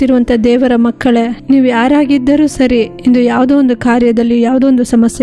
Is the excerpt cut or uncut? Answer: cut